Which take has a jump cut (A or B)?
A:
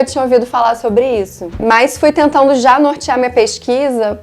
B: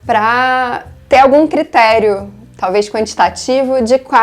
A